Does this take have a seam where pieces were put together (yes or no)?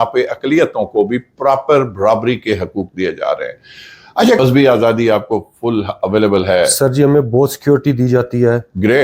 yes